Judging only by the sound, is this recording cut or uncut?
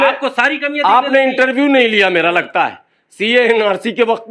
uncut